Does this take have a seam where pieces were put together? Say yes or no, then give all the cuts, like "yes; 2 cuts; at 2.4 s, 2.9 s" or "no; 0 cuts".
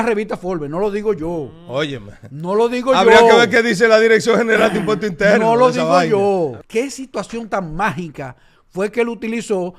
yes; 1 cut; at 6.6 s